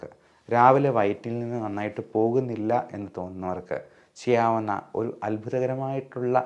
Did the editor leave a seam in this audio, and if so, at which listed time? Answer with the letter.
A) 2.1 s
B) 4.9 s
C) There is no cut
C